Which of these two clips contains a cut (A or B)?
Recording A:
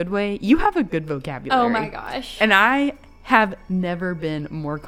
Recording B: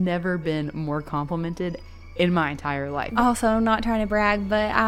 B